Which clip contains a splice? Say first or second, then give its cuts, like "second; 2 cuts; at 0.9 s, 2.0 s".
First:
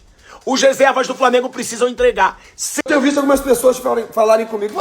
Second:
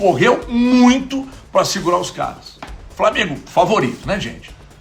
first; 1 cut; at 2.7 s